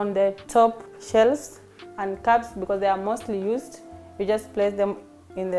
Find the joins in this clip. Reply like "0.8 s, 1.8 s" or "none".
0.9 s